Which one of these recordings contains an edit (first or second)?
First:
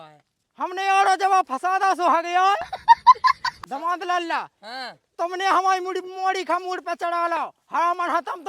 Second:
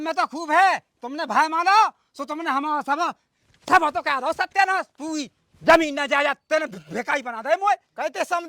first